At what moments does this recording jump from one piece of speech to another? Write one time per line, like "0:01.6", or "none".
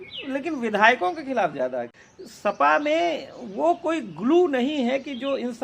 0:01.9